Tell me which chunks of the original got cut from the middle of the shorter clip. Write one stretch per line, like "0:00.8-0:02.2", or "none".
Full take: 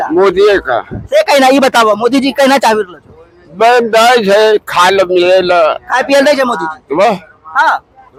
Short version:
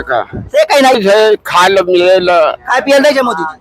0:01.5-0:04.2